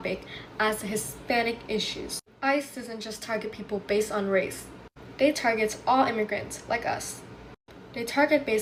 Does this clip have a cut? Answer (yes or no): no